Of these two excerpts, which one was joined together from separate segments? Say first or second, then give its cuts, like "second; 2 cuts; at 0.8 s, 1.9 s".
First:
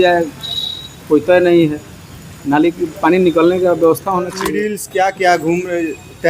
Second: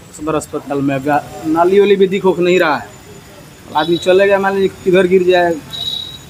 first; 1 cut; at 4.8 s